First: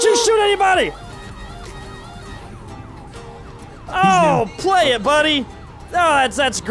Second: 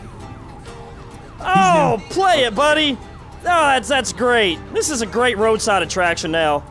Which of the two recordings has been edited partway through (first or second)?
first